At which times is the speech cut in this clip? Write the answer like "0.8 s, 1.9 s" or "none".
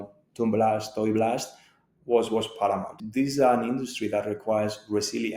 3.0 s

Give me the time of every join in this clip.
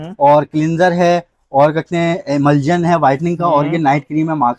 none

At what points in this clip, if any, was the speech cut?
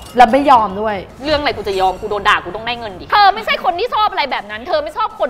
3.0 s

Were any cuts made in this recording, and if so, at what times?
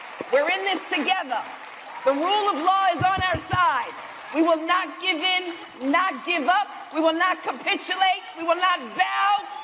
none

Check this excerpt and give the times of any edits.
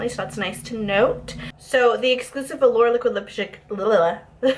1.5 s

